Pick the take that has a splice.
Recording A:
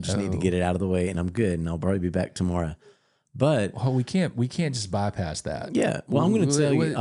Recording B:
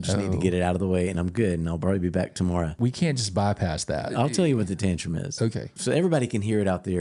B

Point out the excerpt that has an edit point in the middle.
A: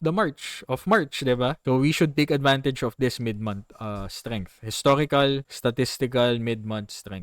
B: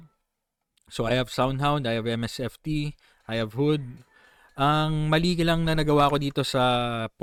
A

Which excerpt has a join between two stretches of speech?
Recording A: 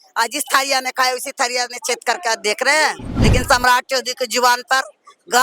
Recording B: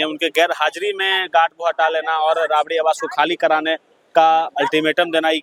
A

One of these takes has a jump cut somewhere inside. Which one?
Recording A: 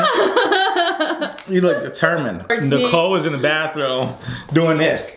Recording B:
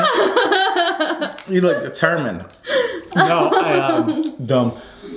A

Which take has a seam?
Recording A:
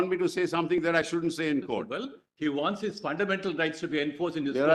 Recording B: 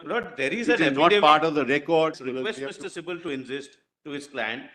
B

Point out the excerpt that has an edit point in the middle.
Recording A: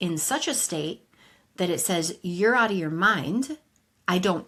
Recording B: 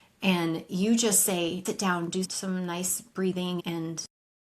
B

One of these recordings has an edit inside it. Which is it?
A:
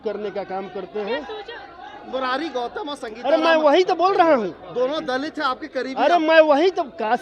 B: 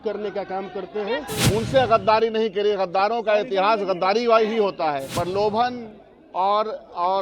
B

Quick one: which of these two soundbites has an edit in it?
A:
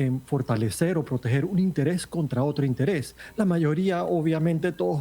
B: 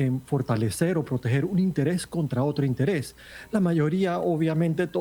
A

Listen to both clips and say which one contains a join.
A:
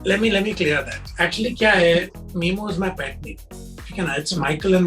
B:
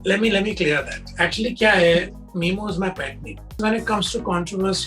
B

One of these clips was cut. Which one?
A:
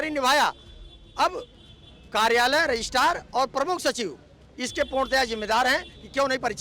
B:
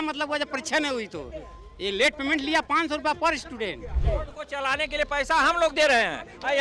B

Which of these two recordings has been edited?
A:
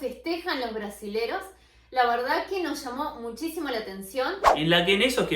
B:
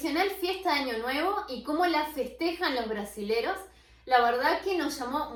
A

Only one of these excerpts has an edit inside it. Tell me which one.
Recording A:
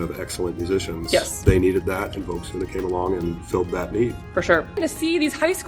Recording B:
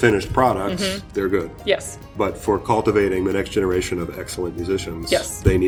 A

